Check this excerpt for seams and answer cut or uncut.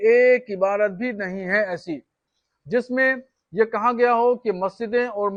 uncut